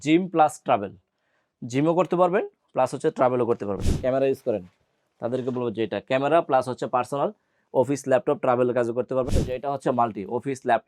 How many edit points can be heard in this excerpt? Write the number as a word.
two